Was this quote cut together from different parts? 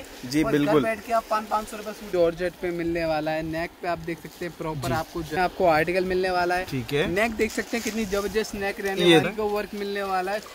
yes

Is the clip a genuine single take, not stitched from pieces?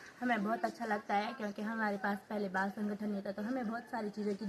yes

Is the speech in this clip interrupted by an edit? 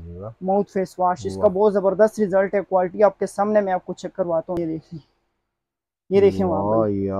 yes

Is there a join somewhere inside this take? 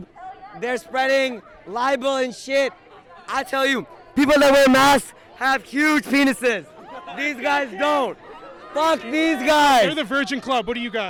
no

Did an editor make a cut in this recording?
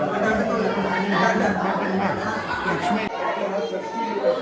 no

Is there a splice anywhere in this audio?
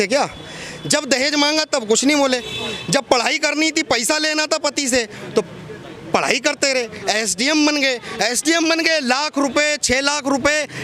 no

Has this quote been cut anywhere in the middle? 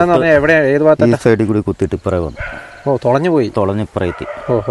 no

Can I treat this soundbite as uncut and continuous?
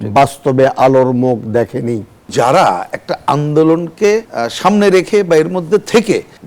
no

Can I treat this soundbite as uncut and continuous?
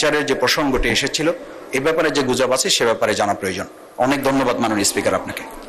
yes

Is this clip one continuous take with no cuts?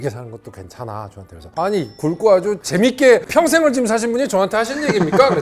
yes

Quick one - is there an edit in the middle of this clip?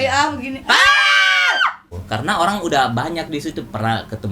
yes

